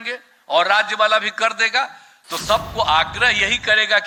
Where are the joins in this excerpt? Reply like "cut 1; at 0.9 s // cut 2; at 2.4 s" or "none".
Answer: none